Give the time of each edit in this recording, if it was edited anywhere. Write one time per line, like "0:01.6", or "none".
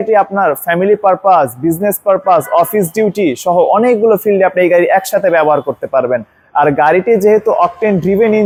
none